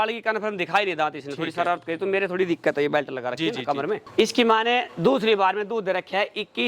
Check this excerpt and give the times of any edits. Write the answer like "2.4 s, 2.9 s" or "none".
4.1 s